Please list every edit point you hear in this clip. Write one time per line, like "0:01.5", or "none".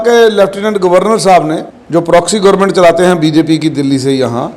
0:01.7